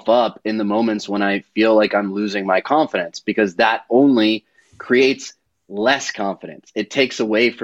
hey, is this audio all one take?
yes; 0 cuts

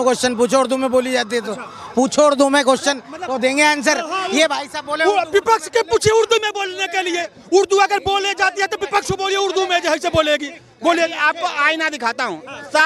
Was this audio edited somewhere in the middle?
no; 0 cuts

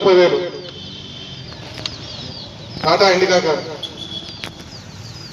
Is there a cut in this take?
no; 0 cuts

